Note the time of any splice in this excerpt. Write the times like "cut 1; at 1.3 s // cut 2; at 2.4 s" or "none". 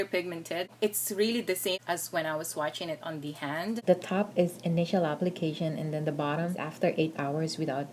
cut 1; at 3.8 s // cut 2; at 6.7 s